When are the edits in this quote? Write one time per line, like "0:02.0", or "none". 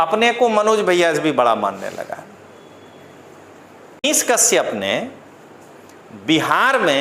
0:04.0